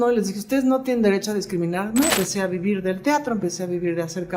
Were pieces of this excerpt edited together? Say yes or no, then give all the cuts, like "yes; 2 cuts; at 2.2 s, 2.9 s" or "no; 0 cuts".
yes; 1 cut; at 2.1 s